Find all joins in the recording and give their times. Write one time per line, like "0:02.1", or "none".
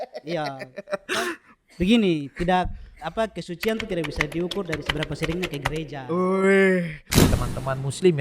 0:07.1